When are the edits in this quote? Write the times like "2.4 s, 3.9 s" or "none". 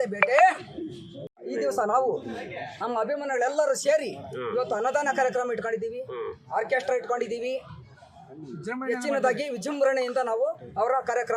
1.1 s